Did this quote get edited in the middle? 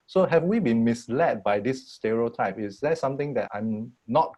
no; 0 cuts

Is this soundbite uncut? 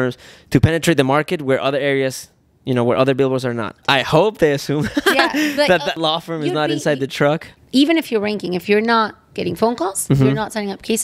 no; 3 cuts; at 3.8 s, 6.0 s, 7.5 s

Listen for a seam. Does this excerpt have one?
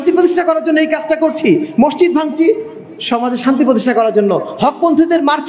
no; 0 cuts

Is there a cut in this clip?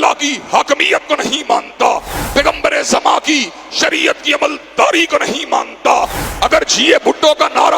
yes; 2 cuts; at 2.1 s, 6.2 s

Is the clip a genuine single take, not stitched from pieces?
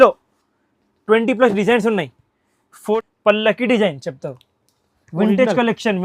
no; 1 cut; at 2.9 s

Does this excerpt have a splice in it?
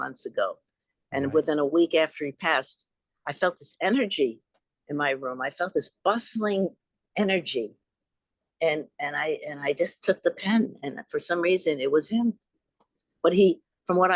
no; 0 cuts

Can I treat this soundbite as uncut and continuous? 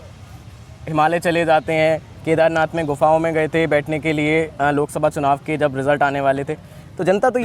yes; 0 cuts

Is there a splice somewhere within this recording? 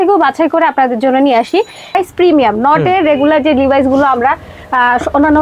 yes; 1 cut; at 1.9 s

